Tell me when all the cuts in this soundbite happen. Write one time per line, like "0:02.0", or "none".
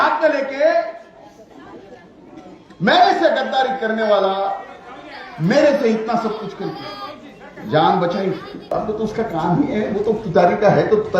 0:08.7